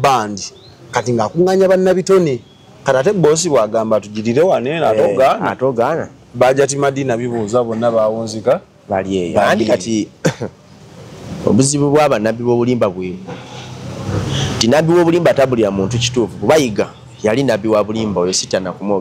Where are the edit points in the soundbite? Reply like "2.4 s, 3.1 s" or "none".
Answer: none